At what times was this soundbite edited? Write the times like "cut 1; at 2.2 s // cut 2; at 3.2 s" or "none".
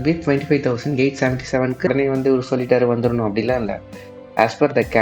cut 1; at 1.9 s

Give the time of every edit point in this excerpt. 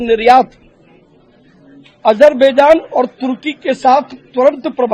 none

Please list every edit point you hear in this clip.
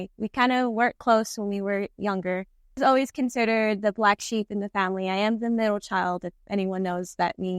cut 1; at 2.8 s

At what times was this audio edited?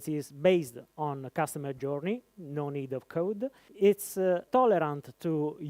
cut 1; at 3.6 s // cut 2; at 4.4 s

